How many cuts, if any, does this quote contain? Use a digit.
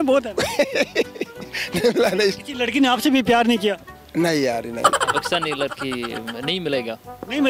1